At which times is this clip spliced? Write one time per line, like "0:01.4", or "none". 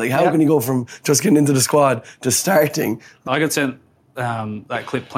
0:03.2

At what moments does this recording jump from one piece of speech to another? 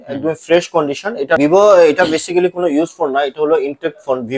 0:01.4

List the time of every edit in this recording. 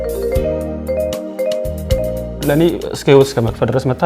0:02.2

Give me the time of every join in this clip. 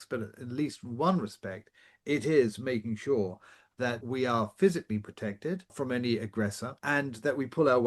0:04.0
0:05.7
0:06.8

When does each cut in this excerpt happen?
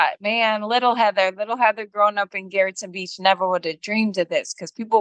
none

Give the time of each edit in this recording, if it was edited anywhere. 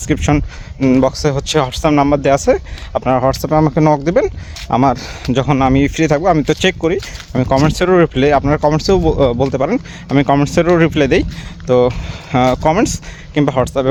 none

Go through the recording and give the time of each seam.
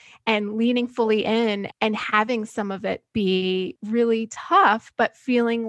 0:01.7
0:03.8

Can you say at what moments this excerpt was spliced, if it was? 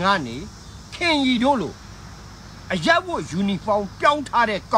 none

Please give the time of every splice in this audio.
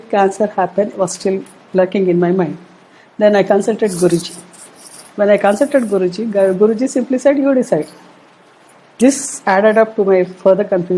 none

